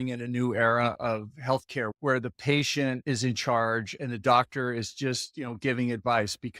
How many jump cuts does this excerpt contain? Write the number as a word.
three